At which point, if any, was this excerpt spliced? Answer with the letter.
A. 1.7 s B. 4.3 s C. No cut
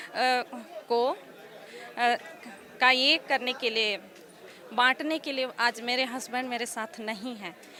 C